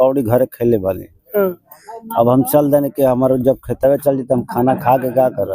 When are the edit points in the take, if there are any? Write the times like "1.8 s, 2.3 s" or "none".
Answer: none